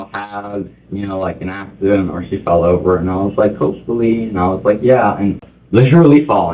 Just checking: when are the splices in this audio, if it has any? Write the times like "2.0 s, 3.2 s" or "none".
5.5 s